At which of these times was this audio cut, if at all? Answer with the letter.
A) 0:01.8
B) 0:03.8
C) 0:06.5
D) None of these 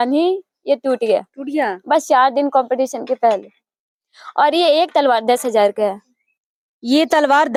D